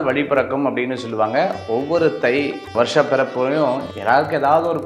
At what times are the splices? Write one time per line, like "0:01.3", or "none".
0:02.7